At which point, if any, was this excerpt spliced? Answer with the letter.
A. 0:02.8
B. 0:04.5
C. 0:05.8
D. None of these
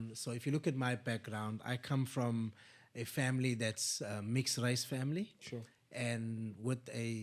D